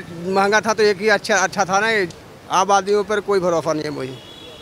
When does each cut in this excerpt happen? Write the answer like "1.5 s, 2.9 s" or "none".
2.1 s